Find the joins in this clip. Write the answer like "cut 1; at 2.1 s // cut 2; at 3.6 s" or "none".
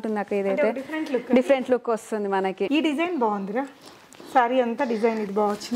cut 1; at 2.7 s

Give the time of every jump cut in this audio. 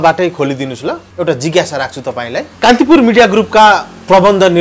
cut 1; at 1.0 s // cut 2; at 2.5 s

